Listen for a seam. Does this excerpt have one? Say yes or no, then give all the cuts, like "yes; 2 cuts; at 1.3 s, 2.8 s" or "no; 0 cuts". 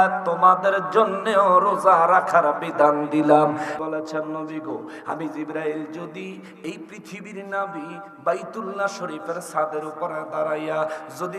yes; 1 cut; at 3.8 s